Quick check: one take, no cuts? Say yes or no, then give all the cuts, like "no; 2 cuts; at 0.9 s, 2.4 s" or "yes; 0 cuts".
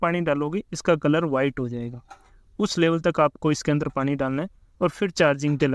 yes; 0 cuts